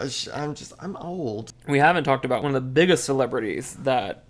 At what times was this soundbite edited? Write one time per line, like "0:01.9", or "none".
0:01.4
0:02.4